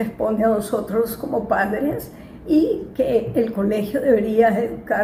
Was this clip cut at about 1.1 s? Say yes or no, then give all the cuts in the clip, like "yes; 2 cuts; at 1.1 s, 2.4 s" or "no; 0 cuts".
no; 0 cuts